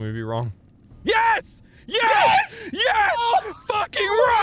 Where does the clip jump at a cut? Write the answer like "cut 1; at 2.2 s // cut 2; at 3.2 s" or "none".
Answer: none